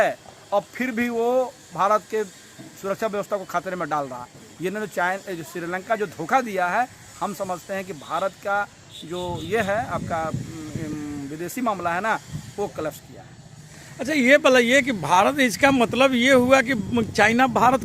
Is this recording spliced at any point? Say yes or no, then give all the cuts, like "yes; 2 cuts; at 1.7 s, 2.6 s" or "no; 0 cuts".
no; 0 cuts